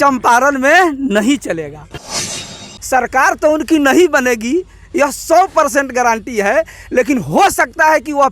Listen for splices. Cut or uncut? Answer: cut